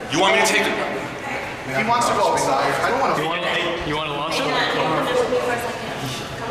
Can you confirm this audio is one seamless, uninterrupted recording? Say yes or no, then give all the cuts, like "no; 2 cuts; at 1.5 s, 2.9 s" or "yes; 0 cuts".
yes; 0 cuts